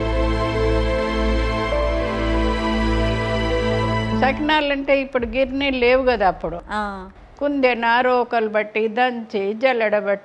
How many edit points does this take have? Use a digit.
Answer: 1